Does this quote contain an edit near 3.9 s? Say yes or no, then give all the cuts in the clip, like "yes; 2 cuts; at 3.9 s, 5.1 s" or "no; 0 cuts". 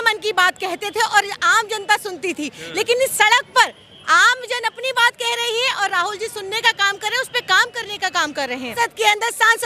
no; 1 cut; at 8.7 s